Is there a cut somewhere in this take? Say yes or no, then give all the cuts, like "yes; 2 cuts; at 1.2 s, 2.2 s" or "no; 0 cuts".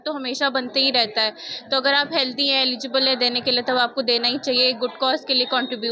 no; 0 cuts